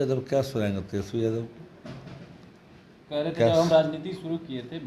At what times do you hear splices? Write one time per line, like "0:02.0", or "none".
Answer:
none